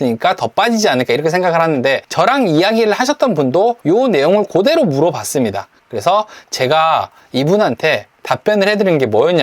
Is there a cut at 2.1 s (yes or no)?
yes